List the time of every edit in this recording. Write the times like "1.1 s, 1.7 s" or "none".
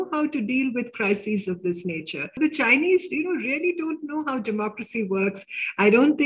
2.3 s